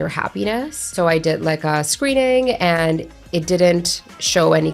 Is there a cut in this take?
yes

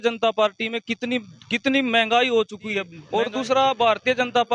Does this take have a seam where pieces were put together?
yes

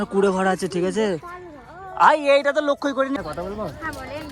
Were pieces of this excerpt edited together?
yes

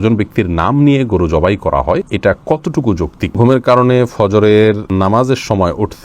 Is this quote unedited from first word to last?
no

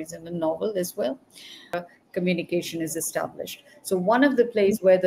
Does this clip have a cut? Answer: yes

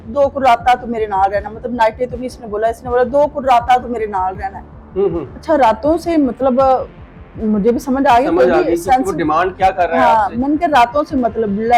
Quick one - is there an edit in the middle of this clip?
no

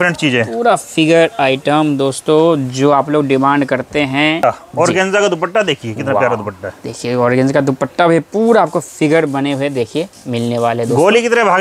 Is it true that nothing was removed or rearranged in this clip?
no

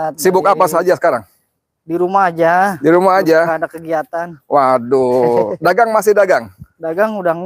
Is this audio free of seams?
yes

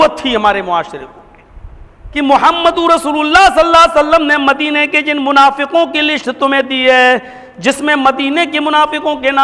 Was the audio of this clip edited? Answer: yes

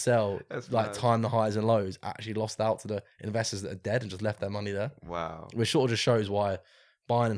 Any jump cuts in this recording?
no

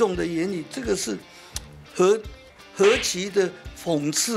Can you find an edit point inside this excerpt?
no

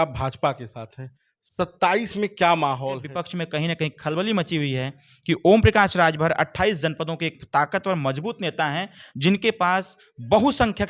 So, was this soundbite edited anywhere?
yes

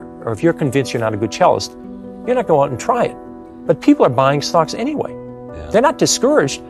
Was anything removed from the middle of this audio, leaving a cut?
no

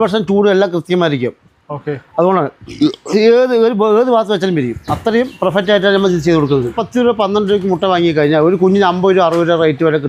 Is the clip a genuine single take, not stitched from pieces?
yes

